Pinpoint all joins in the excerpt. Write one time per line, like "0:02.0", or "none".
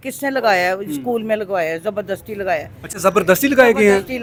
none